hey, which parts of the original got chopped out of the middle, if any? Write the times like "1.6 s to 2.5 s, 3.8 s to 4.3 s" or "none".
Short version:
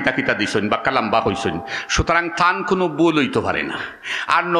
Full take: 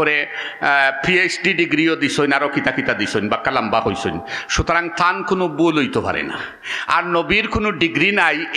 none